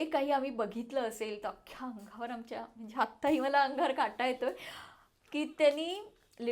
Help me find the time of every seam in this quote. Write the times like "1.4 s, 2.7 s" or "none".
none